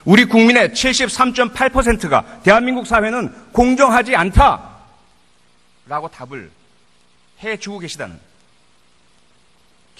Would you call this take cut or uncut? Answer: cut